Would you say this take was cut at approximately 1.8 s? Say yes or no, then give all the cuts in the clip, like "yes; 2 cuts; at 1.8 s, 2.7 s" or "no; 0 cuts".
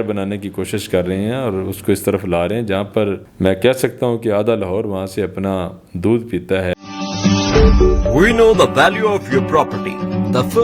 no; 2 cuts; at 3.3 s, 6.8 s